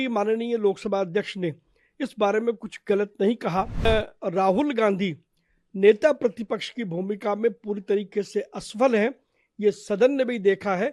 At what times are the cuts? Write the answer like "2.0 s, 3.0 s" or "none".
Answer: 3.9 s